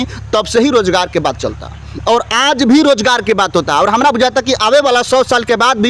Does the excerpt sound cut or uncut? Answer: uncut